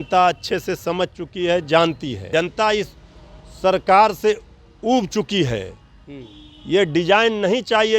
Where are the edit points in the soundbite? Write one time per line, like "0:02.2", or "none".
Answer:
0:02.2

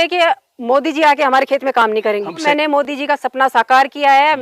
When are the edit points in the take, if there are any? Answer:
0:02.4

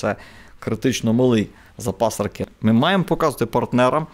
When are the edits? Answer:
0:02.5

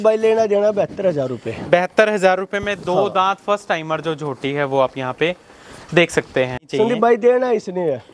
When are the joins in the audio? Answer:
0:06.6

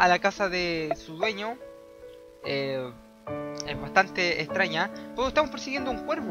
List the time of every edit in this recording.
0:03.1

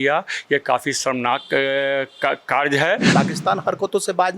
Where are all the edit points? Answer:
0:03.1

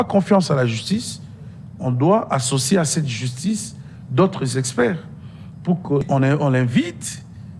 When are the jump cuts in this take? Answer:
0:06.0

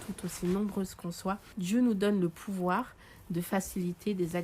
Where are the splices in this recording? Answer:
0:01.4

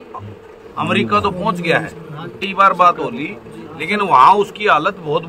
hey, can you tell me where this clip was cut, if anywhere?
0:02.4

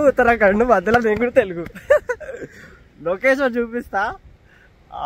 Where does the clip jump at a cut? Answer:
none

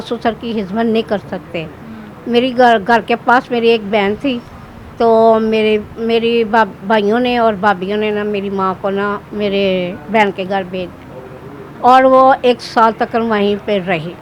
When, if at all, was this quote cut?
none

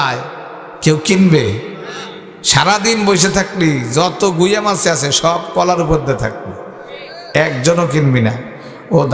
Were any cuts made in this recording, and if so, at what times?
none

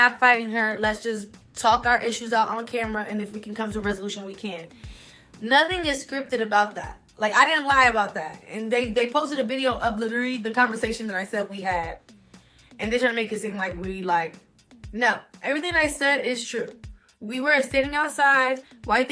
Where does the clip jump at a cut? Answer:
none

